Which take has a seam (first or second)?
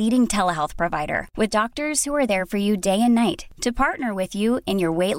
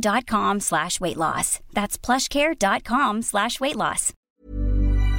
second